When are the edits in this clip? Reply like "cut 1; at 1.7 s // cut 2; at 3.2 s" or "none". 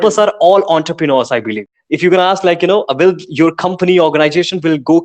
cut 1; at 1.6 s